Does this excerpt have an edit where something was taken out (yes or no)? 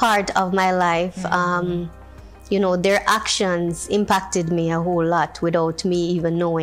no